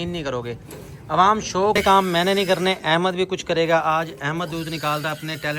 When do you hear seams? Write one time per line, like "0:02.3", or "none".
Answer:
0:01.7